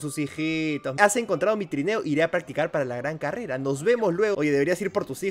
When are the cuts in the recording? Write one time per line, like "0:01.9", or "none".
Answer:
0:01.0
0:04.3